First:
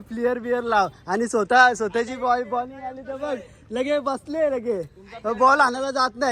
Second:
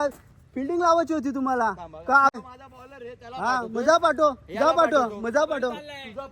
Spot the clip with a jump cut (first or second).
second